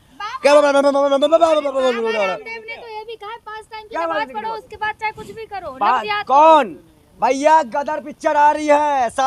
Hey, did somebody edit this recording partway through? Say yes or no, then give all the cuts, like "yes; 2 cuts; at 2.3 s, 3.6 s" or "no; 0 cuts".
no; 0 cuts